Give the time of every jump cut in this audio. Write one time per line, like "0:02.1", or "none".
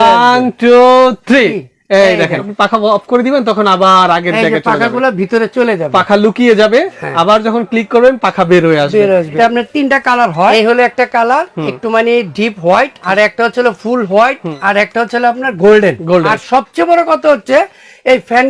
0:02.5
0:09.3
0:10.5
0:13.0
0:14.5
0:16.4